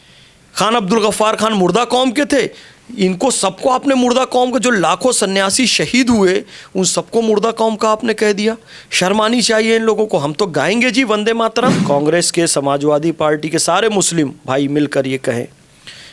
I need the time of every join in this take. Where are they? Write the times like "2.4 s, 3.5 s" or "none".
11.8 s